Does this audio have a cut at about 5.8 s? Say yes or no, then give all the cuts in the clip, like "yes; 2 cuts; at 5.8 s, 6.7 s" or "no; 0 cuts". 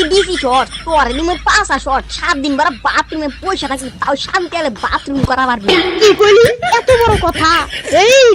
yes; 1 cut; at 5.8 s